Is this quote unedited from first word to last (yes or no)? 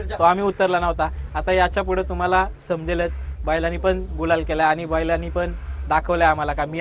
yes